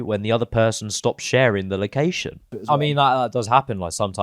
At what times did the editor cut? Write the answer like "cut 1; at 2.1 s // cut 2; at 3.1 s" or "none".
cut 1; at 2.6 s